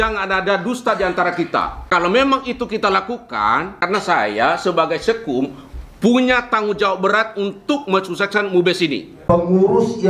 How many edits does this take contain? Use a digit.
3